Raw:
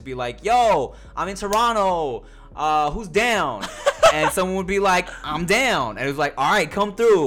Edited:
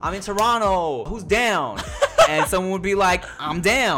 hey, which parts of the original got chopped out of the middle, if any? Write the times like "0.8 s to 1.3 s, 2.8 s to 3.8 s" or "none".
2.3 s to 3.0 s